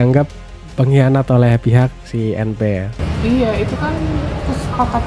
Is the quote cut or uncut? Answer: cut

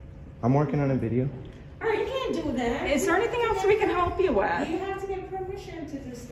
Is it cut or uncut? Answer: uncut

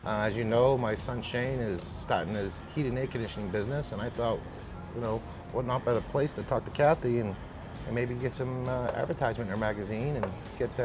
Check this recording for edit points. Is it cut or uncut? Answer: uncut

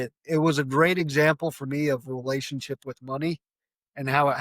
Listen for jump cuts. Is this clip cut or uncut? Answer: uncut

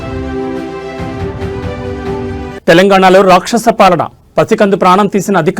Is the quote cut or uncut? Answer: cut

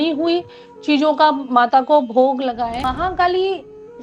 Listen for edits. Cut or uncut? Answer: cut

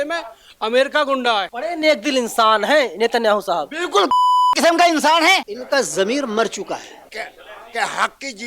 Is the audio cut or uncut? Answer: cut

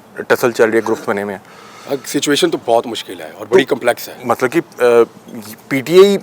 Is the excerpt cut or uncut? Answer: uncut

